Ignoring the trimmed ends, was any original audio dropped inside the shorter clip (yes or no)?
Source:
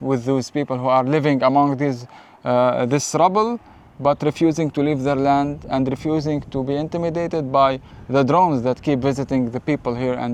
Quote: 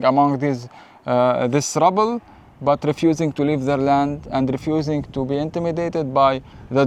no